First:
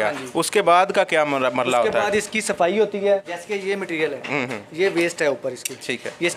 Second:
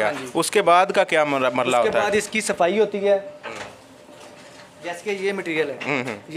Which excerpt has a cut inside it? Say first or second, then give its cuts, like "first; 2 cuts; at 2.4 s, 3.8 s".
first; 1 cut; at 3.3 s